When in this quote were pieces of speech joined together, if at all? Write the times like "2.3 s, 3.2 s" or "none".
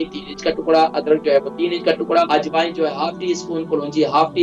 2.3 s